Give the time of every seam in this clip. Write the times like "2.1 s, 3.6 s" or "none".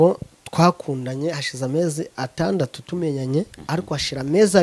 none